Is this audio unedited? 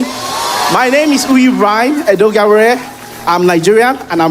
yes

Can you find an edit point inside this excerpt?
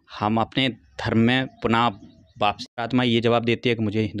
yes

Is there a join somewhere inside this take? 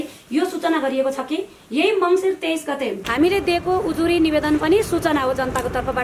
yes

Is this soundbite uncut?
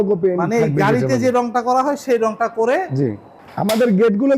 no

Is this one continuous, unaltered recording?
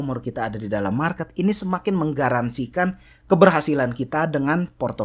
yes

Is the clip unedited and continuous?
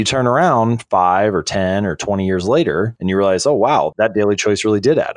yes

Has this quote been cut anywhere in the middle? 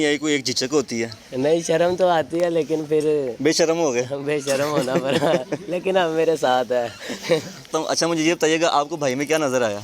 yes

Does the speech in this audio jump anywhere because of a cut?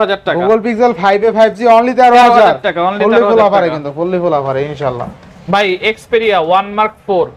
no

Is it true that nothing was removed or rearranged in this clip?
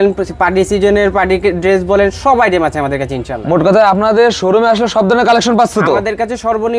yes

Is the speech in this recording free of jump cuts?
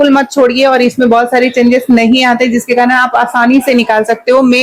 yes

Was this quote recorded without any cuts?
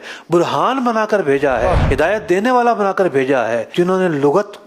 no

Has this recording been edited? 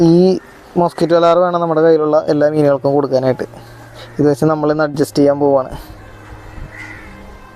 no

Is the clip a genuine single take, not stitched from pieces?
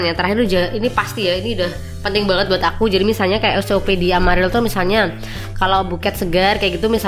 yes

